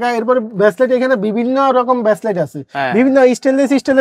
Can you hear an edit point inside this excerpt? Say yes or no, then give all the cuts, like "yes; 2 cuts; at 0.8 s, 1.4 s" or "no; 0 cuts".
no; 0 cuts